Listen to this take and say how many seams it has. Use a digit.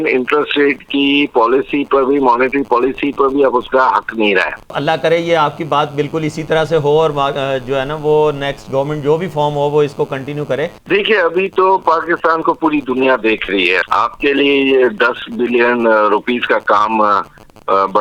3